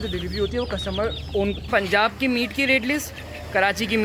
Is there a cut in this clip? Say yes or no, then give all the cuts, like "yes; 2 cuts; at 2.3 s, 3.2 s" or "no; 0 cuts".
yes; 1 cut; at 1.7 s